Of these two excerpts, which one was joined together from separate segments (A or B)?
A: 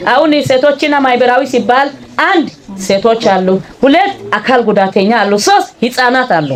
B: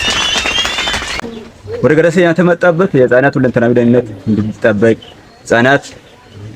B